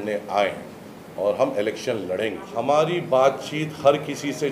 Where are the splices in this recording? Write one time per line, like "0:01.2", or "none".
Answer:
0:02.4